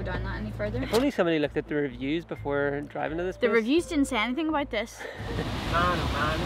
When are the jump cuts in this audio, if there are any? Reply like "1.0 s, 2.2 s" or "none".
0.8 s, 5.3 s